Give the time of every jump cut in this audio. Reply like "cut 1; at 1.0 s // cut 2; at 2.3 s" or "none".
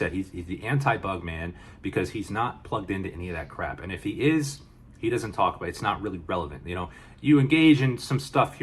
none